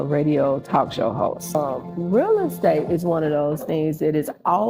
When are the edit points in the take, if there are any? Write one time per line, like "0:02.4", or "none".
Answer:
0:01.5